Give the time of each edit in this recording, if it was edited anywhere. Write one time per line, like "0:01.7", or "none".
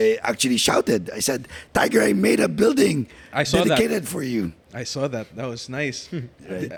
none

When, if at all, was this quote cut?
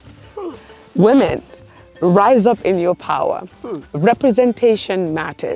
none

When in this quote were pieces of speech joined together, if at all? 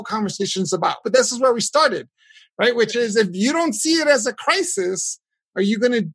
0:01.0

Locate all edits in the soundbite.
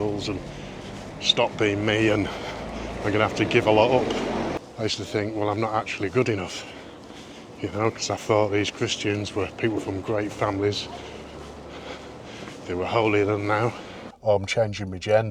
0:04.6
0:14.1

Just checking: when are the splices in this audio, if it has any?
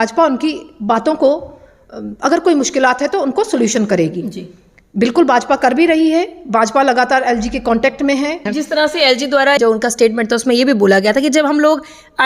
0:08.5

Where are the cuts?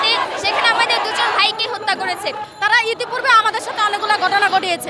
0:02.5

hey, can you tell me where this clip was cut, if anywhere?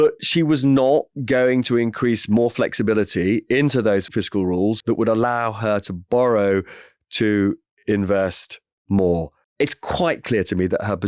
0:09.4

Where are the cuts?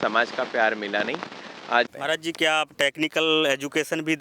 0:01.9

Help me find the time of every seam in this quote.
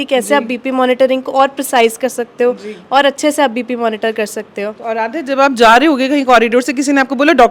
none

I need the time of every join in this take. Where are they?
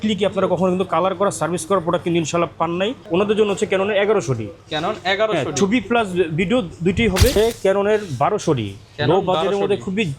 0:03.0
0:07.4

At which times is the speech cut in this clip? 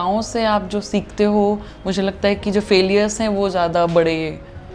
none

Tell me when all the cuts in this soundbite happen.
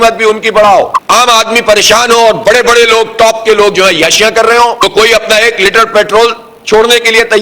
0:01.0
0:04.8

